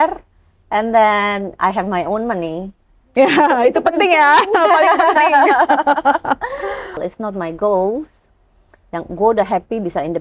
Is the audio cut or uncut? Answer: cut